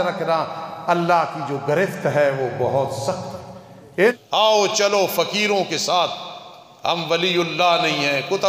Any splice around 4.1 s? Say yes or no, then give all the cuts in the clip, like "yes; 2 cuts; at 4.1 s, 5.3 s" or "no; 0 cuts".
yes; 1 cut; at 4.1 s